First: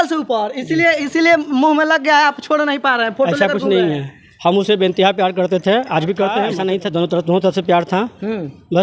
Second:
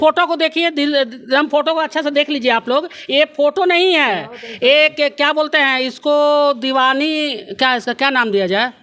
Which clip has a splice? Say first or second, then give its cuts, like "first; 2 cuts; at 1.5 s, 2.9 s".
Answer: first; 1 cut; at 6.5 s